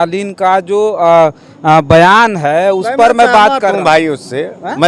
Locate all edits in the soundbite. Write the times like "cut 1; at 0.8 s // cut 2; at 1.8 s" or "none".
none